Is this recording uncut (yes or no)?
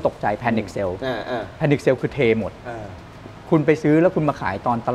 yes